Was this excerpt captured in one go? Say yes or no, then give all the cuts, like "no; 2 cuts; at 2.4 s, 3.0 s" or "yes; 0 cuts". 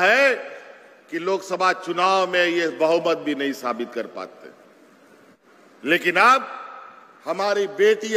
no; 1 cut; at 5.4 s